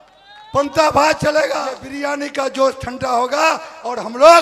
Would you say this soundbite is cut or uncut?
cut